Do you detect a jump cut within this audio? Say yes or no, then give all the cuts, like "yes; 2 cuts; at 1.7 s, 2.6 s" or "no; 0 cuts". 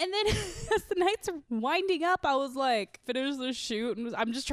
yes; 2 cuts; at 1.4 s, 3.0 s